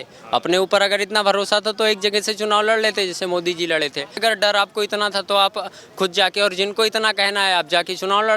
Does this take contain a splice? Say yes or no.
yes